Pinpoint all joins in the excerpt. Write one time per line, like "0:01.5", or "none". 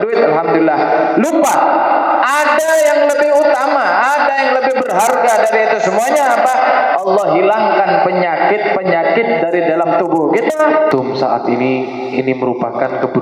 0:10.9

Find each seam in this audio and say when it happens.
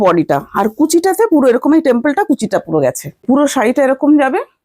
0:03.2

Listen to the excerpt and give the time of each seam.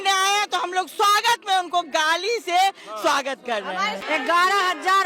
0:04.0

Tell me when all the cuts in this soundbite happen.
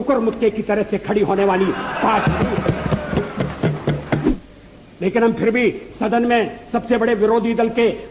0:04.2

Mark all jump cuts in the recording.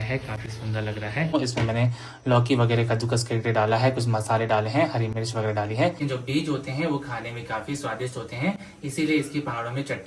0:01.3
0:06.0

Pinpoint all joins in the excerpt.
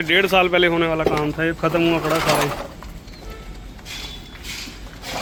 none

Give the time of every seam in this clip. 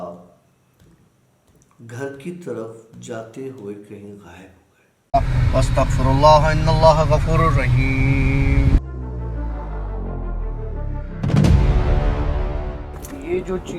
0:05.0

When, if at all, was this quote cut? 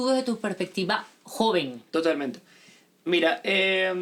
none

